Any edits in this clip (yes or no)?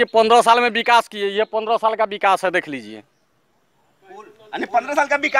no